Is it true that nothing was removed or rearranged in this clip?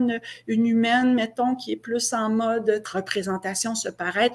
no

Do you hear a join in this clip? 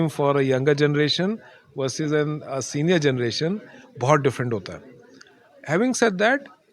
no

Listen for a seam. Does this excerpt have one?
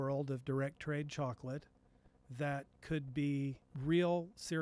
yes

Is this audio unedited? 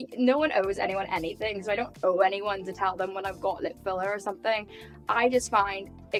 yes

